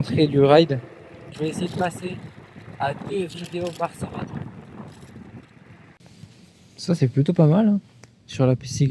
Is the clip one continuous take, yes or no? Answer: no